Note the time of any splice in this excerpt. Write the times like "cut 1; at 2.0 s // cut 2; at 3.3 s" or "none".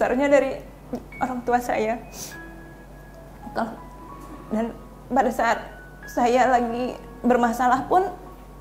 cut 1; at 3.9 s